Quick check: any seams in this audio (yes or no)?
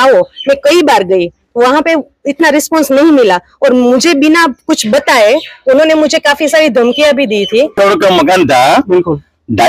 yes